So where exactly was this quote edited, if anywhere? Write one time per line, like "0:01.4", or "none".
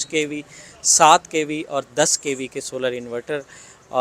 none